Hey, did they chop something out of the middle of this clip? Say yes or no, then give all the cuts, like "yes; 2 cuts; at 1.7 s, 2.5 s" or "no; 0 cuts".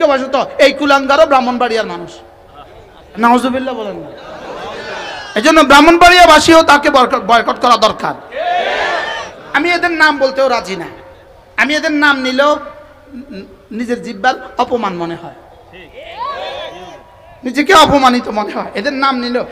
yes; 2 cuts; at 3.2 s, 9.2 s